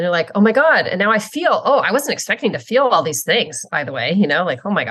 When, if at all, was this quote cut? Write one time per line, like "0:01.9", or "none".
none